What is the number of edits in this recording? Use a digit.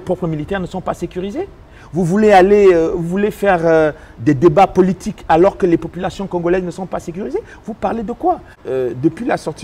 1